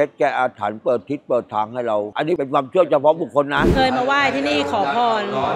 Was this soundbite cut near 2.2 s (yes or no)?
yes